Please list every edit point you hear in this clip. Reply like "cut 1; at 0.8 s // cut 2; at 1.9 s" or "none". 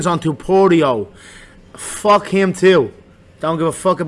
none